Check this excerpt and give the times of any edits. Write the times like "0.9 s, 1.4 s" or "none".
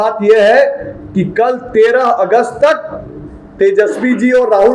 none